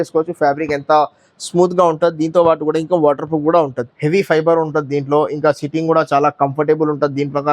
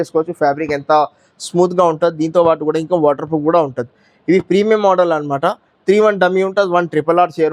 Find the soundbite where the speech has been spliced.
first; 1 cut; at 3.9 s

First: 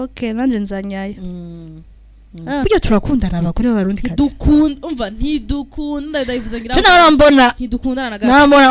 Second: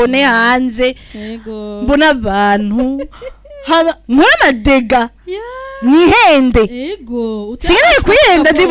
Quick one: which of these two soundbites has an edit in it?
first; 1 cut; at 2.6 s

